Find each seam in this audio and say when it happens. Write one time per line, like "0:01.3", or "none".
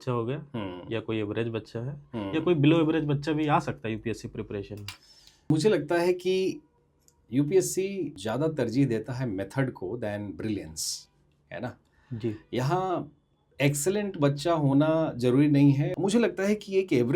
0:05.5
0:06.7
0:08.2
0:15.9